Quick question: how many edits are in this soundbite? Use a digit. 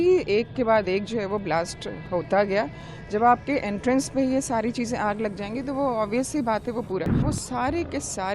1